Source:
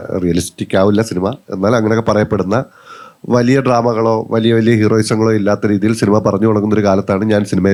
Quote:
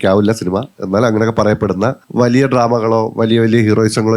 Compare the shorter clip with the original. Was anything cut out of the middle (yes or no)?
yes